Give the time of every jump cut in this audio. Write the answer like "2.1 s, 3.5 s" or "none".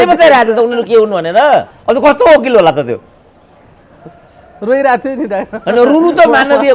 1.8 s